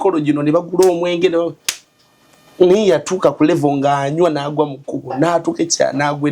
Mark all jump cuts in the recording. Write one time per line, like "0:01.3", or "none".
none